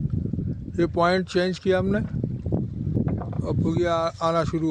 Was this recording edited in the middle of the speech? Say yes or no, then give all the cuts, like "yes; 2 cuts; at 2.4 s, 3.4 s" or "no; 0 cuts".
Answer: no; 0 cuts